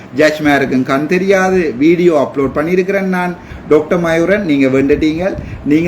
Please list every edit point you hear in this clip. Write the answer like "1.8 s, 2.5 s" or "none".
3.5 s